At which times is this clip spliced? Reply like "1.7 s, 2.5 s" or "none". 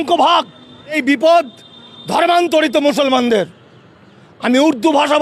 1.0 s